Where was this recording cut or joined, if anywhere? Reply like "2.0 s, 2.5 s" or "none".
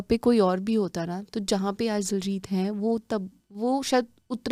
none